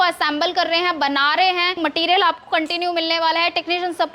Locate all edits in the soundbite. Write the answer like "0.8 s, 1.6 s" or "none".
1.8 s